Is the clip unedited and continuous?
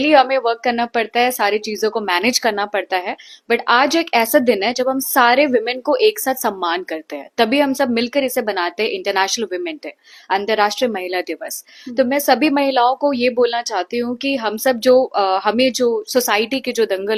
yes; 0 cuts

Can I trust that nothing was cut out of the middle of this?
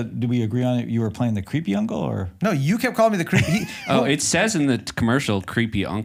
yes; 0 cuts

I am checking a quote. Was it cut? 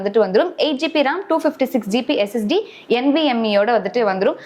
no; 0 cuts

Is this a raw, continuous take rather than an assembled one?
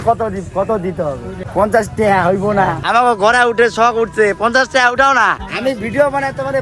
no; 3 cuts; at 1.3 s, 2.8 s, 5.5 s

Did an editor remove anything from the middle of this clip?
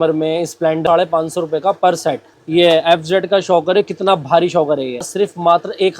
yes; 3 cuts; at 0.8 s, 2.3 s, 5.1 s

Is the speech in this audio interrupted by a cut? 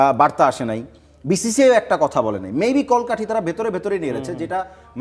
no; 0 cuts

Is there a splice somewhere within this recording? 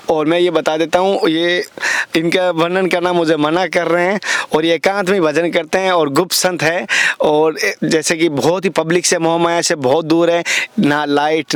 no; 0 cuts

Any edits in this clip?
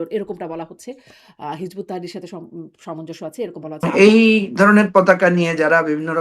yes; 1 cut; at 3.8 s

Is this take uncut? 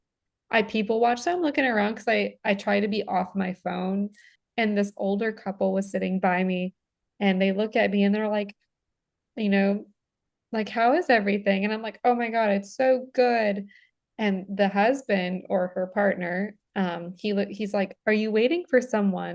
no; 1 cut; at 4.4 s

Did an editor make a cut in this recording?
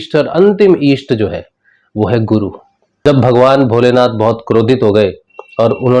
yes; 1 cut; at 3.0 s

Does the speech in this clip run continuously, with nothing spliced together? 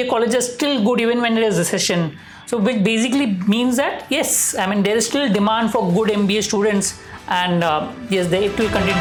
yes; 0 cuts

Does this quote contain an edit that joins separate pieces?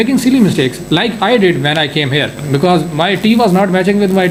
no; 0 cuts

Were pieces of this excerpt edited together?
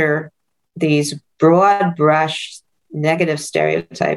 no; 0 cuts

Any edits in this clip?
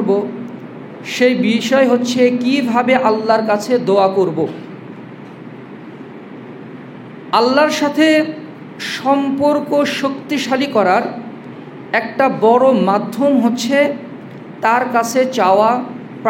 no; 0 cuts

